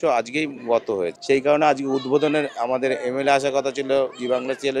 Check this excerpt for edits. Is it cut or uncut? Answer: cut